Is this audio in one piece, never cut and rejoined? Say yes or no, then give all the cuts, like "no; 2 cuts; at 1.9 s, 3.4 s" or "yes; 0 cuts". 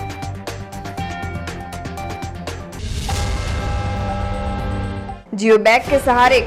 yes; 0 cuts